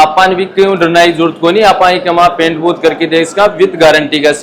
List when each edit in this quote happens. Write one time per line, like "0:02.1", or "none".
none